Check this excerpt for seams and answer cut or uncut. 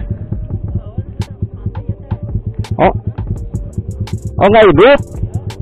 uncut